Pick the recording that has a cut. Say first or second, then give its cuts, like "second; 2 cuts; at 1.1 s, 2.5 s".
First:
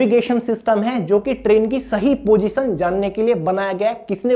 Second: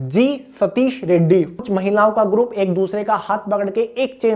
second; 1 cut; at 1.5 s